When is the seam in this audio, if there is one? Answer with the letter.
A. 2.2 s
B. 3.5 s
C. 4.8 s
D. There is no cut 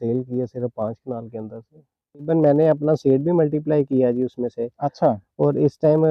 D